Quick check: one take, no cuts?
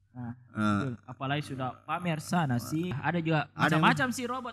no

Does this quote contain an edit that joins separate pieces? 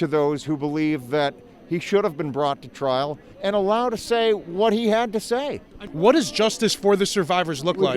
yes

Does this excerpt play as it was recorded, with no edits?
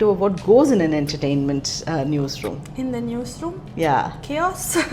yes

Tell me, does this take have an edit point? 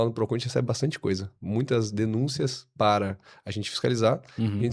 no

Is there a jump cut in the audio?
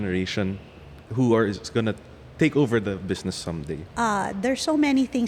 yes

